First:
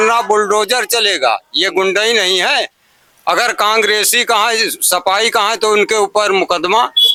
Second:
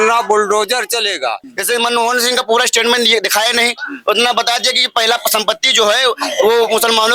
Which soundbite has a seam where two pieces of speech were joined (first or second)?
second